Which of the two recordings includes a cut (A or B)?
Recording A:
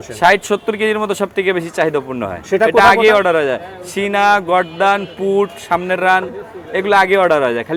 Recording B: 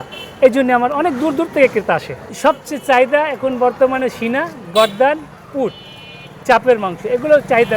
B